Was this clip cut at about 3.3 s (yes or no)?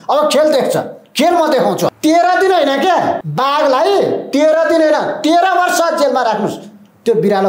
yes